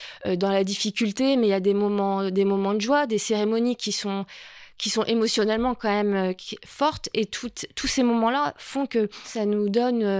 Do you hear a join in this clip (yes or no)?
yes